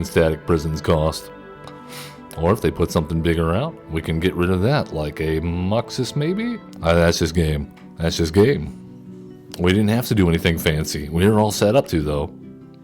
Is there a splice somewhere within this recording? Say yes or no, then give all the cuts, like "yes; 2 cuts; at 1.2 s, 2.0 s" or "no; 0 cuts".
yes; 1 cut; at 6.7 s